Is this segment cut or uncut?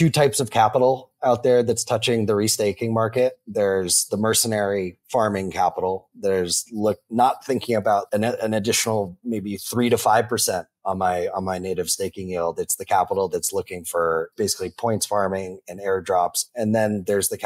cut